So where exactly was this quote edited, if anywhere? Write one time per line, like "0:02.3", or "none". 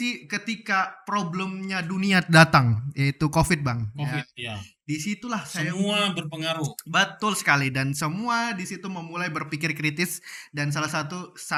none